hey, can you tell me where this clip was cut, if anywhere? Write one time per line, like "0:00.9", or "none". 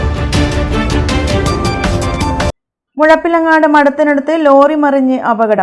0:02.5